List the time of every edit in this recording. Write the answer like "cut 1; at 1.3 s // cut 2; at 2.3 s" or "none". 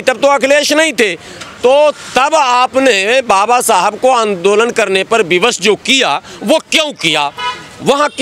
none